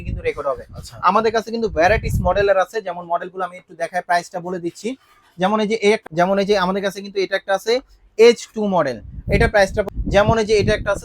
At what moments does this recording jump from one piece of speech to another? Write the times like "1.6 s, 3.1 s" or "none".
6.0 s, 9.9 s

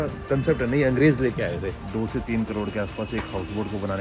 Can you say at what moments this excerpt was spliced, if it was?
1.8 s

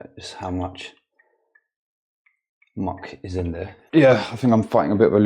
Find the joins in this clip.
3.8 s

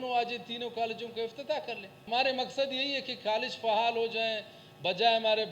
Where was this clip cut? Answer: 1.9 s

